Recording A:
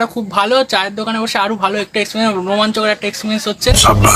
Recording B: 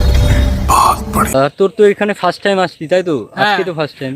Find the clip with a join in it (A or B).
B